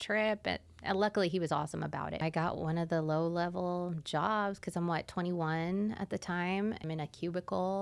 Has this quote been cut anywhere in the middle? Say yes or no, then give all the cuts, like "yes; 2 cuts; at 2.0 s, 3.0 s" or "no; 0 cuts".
yes; 2 cuts; at 2.2 s, 6.8 s